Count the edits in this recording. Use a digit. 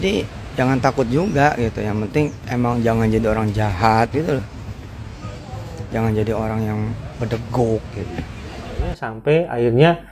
1